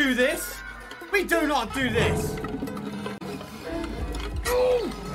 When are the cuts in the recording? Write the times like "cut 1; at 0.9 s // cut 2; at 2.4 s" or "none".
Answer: cut 1; at 3.4 s

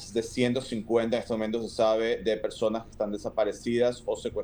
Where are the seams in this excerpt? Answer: none

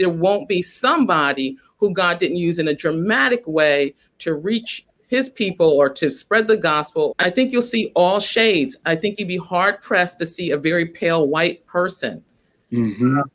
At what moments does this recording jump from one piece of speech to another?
cut 1; at 4.9 s // cut 2; at 7.1 s // cut 3; at 8.8 s

